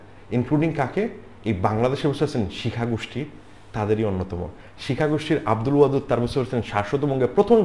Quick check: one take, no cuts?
yes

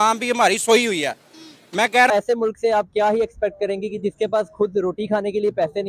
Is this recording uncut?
no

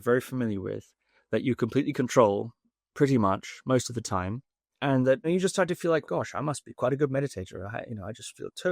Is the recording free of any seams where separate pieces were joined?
no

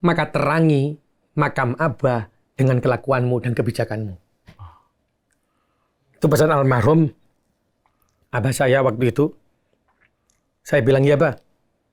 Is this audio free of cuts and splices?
yes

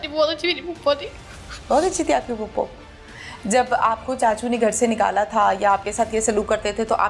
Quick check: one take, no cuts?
yes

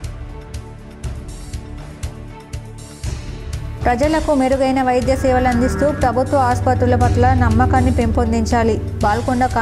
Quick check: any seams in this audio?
no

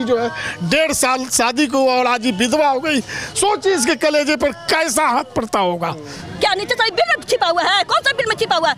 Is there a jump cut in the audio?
yes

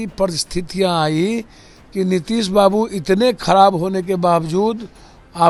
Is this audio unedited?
yes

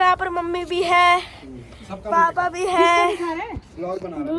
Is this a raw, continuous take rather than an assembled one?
yes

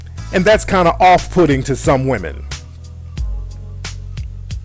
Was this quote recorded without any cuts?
no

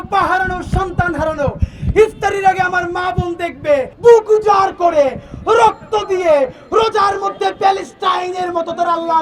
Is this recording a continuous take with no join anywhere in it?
no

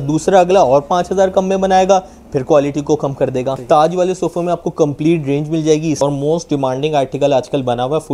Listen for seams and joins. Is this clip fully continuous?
no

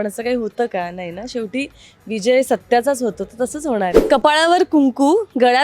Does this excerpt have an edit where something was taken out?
yes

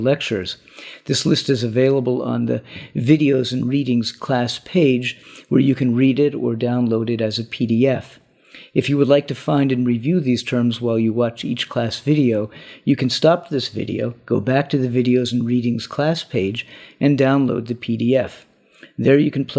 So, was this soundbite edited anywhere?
no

